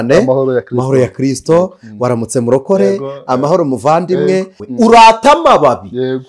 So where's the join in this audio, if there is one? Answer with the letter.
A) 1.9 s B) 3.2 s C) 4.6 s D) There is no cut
C